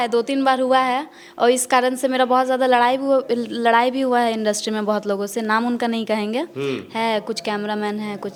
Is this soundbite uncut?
yes; 0 cuts

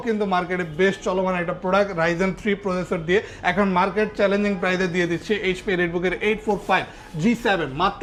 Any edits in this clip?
no; 0 cuts

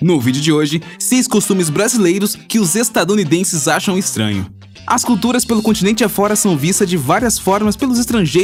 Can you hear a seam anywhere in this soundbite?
no; 0 cuts

